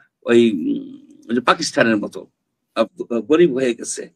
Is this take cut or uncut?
cut